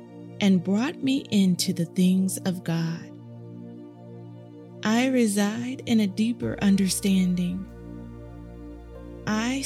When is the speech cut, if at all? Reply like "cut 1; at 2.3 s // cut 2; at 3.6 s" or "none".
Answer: cut 1; at 3.0 s // cut 2; at 4.4 s